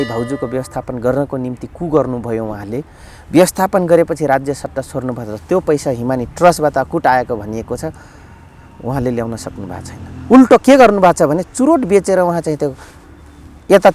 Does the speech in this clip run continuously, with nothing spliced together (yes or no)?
yes